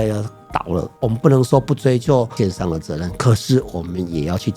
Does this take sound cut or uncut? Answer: cut